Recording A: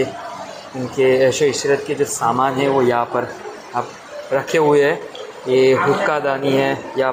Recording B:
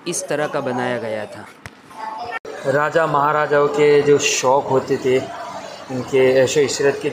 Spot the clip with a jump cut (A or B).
B